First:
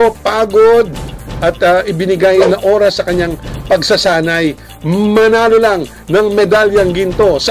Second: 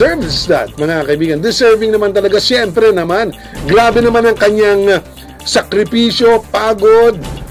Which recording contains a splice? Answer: first; 1 cut; at 2.4 s

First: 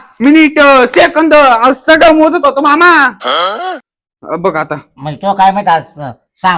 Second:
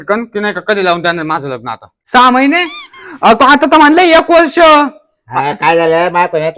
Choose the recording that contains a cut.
second; 1 cut; at 2.0 s

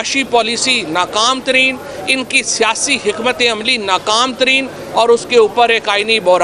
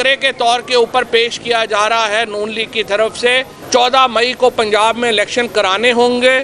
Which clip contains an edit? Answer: second; 1 cut; at 3.5 s

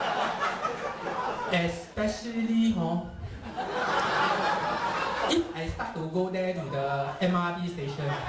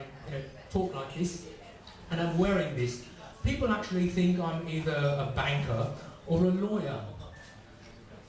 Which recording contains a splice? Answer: second; 1 cut; at 7.2 s

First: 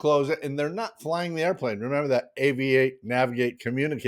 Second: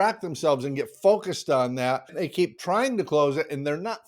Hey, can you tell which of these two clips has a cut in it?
second; 1 cut; at 2.1 s

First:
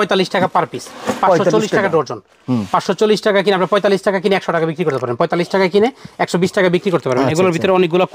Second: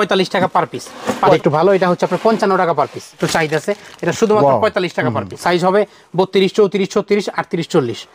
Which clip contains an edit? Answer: second; 3 cuts; at 1.3 s, 3.2 s, 5.4 s

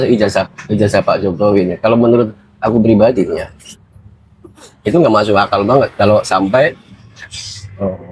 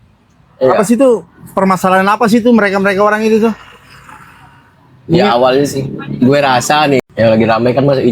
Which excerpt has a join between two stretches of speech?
second; 1 cut; at 7.0 s

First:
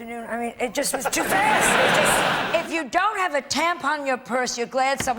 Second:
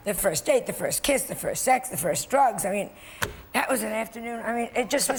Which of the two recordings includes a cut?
first; 1 cut; at 2.4 s

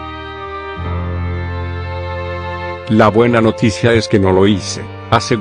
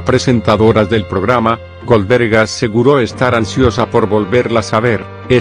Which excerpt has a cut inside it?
first; 1 cut; at 2.8 s

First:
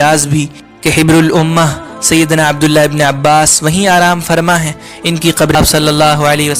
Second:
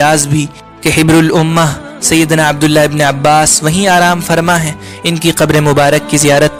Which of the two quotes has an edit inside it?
first; 1 cut; at 5.5 s

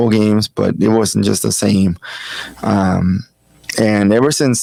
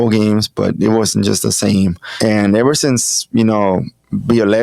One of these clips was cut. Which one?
second; 1 cut; at 2.0 s

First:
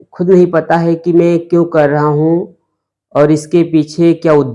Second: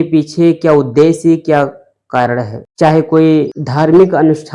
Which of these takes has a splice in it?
second; 2 cuts; at 2.6 s, 3.6 s

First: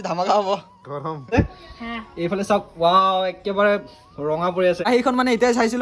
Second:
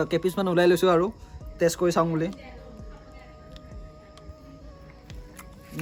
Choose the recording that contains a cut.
first; 2 cuts; at 1.3 s, 4.8 s

